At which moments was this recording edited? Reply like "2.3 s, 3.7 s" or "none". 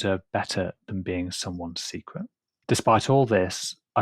2.5 s